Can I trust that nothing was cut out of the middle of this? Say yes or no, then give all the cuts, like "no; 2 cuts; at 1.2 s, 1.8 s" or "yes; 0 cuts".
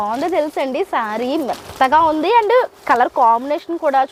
yes; 0 cuts